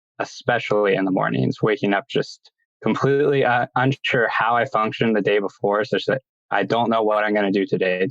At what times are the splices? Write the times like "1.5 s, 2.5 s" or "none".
6.3 s